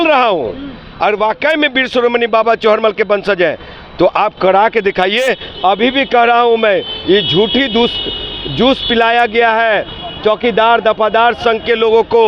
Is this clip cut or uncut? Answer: uncut